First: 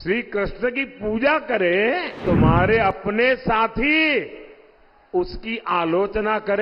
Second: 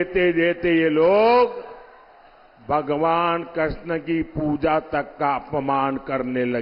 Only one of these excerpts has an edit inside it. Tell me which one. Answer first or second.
first